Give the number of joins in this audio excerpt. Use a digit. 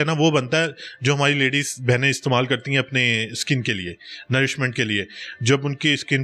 0